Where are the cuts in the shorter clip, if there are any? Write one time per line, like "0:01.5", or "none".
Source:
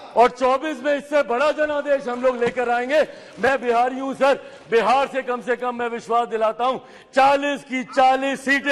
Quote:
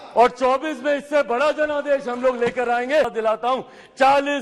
0:03.1